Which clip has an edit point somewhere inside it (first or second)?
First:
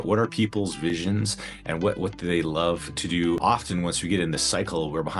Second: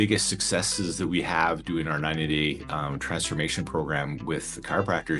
first